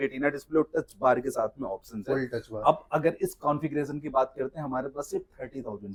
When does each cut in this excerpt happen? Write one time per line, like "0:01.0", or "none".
none